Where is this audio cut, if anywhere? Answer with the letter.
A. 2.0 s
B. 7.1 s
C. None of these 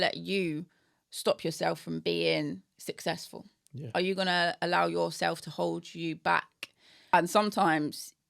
B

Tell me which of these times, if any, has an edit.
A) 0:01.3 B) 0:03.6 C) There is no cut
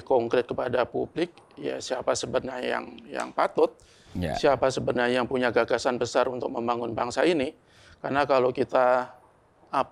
C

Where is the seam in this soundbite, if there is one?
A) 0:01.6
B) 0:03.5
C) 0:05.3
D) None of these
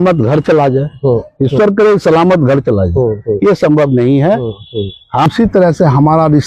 C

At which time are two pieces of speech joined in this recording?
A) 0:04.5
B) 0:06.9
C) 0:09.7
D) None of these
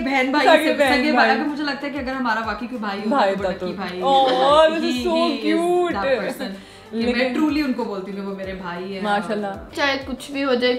C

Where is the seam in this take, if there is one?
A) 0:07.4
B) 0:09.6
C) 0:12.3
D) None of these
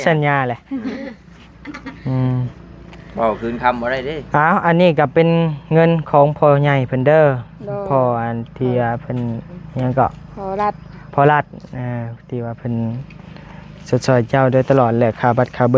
D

